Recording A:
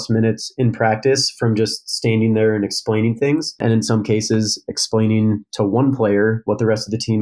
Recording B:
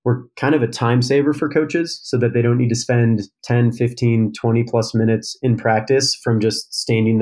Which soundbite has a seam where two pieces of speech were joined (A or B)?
A